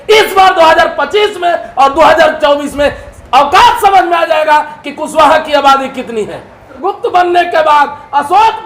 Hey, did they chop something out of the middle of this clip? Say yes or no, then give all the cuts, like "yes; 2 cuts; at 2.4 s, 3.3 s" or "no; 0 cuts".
yes; 1 cut; at 6.7 s